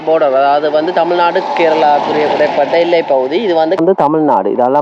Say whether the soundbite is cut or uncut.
cut